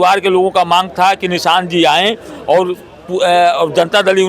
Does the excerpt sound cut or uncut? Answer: uncut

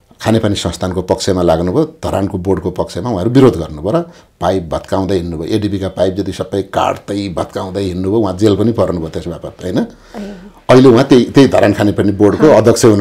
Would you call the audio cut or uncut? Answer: uncut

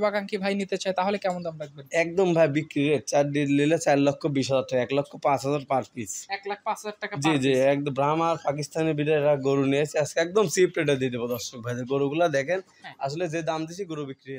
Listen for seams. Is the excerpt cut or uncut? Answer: uncut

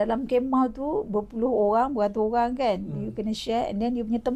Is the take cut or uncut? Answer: uncut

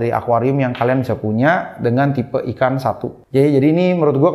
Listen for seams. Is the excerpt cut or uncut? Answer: cut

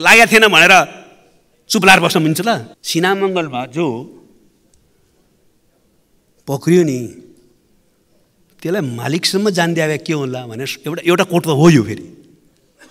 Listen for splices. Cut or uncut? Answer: cut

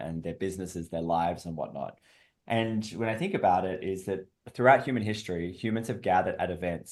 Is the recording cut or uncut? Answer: uncut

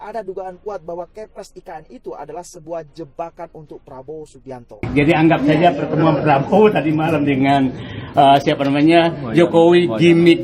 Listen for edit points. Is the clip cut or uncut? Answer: cut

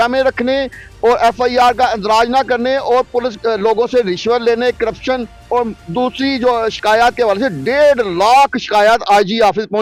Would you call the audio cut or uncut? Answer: uncut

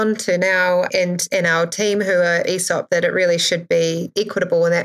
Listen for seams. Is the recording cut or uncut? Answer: uncut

